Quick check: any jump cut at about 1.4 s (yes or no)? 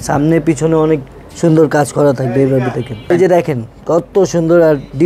no